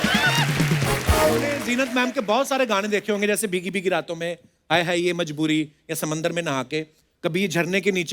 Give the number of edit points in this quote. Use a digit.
1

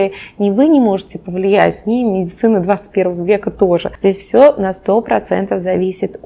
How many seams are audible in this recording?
1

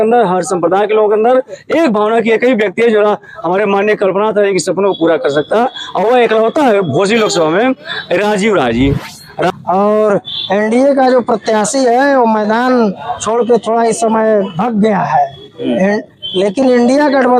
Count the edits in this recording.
1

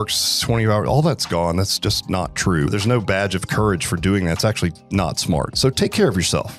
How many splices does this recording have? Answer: 2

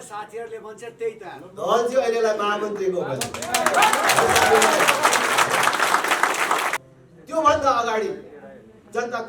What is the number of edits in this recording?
1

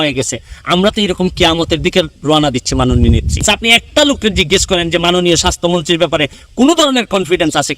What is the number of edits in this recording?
1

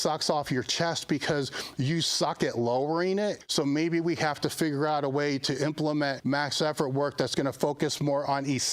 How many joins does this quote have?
2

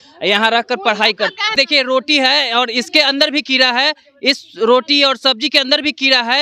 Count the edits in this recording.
1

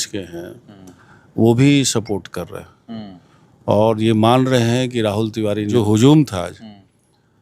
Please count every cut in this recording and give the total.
1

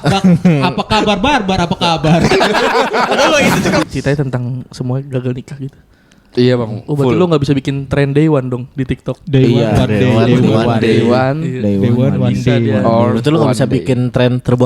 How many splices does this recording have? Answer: 1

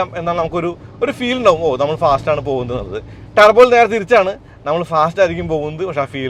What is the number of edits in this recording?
0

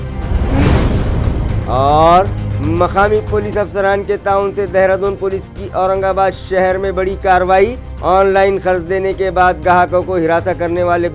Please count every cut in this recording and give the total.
0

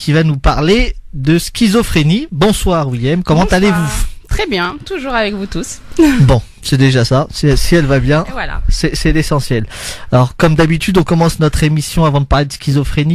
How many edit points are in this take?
1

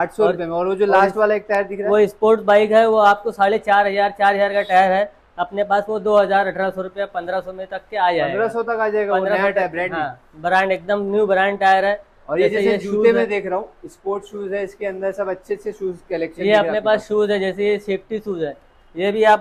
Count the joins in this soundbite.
0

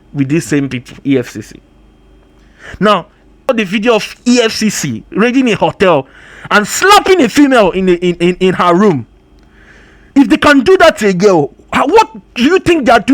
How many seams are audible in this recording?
1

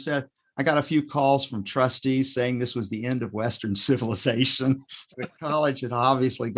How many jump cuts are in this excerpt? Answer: 1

